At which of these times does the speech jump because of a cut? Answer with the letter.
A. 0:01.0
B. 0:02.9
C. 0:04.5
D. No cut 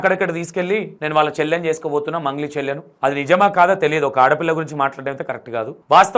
A